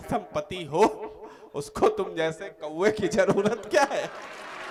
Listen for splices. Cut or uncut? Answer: uncut